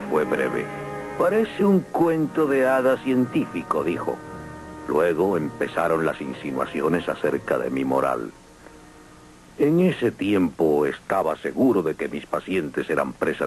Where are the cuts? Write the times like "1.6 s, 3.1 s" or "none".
11.5 s